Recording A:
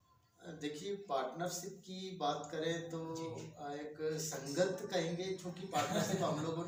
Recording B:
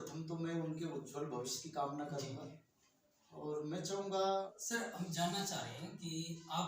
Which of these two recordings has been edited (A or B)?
B